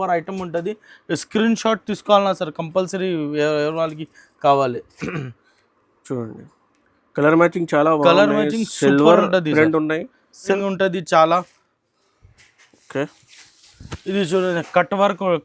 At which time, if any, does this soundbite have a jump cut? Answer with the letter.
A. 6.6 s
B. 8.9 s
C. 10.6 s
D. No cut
C